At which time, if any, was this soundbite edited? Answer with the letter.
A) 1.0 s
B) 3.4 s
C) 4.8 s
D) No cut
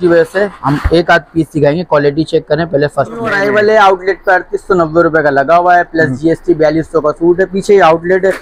B